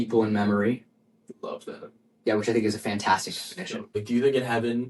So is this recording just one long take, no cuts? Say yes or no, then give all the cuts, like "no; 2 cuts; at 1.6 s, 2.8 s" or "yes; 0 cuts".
no; 1 cut; at 4.0 s